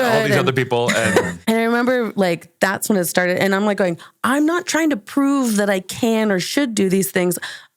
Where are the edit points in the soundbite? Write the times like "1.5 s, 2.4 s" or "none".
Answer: 1.3 s